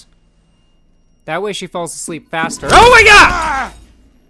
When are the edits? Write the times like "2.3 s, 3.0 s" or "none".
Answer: 3.3 s